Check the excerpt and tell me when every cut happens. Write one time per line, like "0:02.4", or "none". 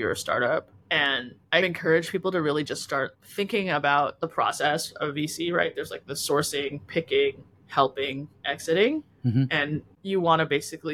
none

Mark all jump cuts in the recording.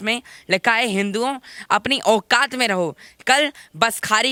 none

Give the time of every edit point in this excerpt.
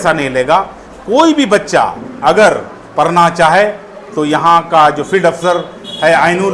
none

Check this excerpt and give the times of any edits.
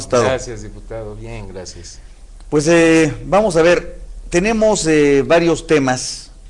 0:03.2

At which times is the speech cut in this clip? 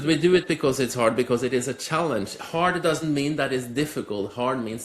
none

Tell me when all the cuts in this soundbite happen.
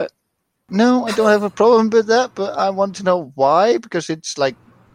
none

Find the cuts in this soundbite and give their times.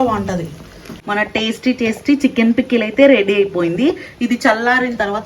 0:00.9

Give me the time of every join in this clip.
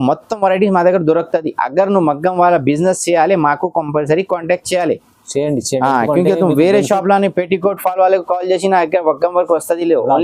none

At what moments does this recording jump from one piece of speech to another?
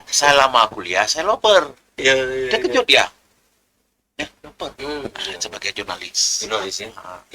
0:04.8

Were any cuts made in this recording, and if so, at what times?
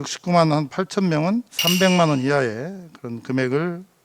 0:01.5

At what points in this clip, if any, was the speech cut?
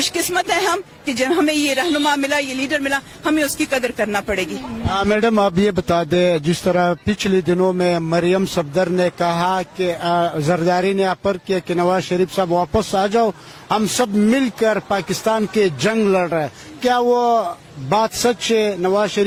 none

